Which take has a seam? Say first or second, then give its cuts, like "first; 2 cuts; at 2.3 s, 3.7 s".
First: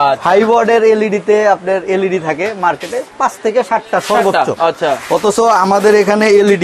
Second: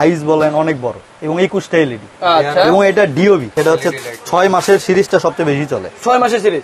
second; 1 cut; at 3.5 s